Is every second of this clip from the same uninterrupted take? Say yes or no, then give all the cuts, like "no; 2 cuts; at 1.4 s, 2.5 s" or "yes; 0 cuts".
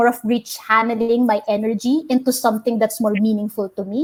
yes; 0 cuts